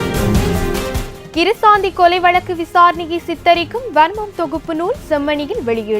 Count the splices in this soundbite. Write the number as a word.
one